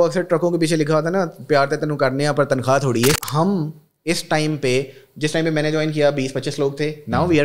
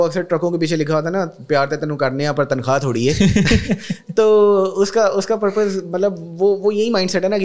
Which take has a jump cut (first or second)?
first